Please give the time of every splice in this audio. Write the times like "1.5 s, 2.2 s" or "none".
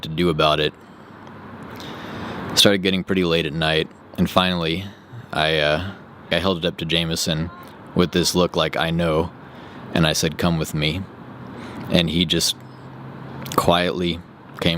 6.3 s